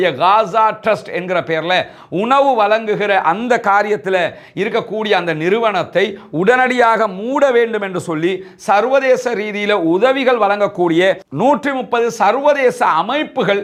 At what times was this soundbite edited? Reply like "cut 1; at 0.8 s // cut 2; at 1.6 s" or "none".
none